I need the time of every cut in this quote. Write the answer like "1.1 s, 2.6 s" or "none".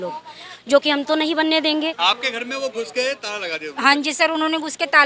2.0 s